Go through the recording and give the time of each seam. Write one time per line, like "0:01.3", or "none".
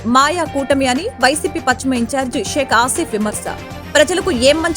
none